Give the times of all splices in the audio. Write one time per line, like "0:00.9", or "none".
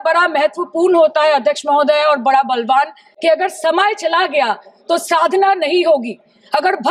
0:03.0